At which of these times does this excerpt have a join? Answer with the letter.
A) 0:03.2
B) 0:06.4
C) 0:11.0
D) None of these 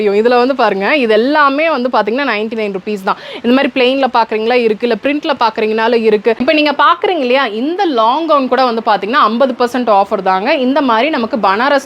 B